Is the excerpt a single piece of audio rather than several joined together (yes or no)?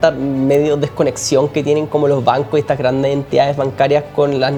yes